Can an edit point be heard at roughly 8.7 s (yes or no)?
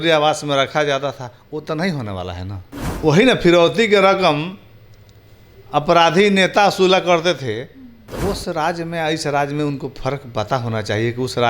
no